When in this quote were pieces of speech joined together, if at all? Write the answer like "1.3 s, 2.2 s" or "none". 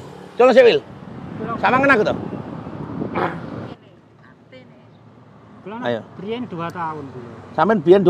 3.6 s